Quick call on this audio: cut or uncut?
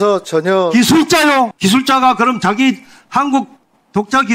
cut